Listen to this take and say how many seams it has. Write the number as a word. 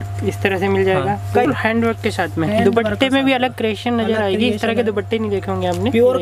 one